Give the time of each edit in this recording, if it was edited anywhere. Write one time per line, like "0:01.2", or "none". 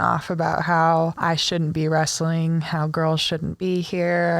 0:01.2